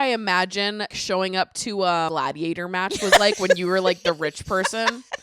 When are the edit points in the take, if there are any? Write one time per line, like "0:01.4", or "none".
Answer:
0:00.9
0:02.1